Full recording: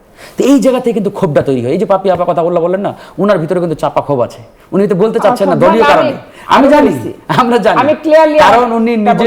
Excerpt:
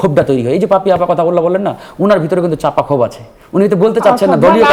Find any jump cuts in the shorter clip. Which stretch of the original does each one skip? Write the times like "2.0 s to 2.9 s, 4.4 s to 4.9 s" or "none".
none